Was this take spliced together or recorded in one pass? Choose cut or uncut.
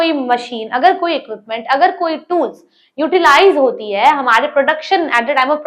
uncut